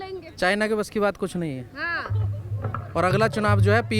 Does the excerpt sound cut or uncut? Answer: uncut